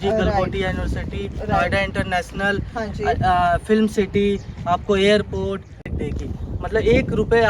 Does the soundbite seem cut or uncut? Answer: cut